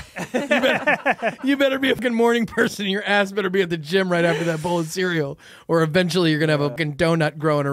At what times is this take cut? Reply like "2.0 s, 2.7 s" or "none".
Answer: 2.0 s, 6.8 s